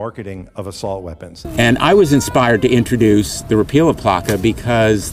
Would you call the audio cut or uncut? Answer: cut